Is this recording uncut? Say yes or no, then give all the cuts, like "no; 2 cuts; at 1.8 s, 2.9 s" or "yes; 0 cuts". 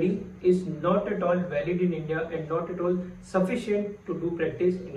yes; 0 cuts